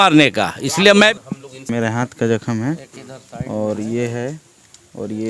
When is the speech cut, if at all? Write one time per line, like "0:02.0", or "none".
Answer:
0:01.1